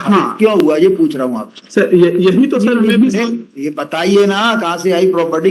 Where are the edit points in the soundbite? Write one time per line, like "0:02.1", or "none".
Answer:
none